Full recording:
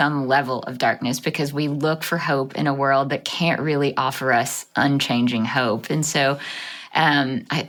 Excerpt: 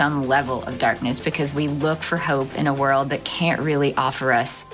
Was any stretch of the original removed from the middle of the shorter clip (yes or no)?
no